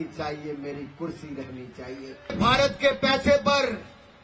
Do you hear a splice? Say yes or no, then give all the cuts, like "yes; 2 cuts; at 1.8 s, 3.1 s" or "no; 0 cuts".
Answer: yes; 1 cut; at 2.4 s